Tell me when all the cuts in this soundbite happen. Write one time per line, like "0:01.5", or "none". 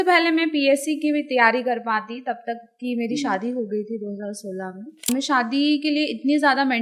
0:05.1